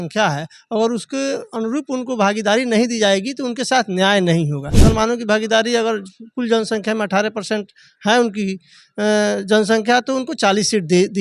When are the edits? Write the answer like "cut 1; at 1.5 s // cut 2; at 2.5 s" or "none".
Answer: cut 1; at 4.7 s